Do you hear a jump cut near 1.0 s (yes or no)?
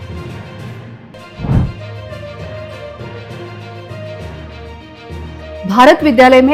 yes